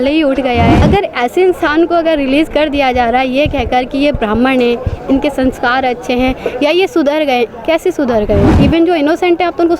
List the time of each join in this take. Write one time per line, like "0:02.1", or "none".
0:00.8
0:08.5